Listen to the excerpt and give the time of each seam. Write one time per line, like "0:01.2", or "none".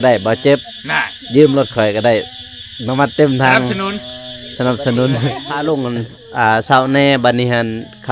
0:05.5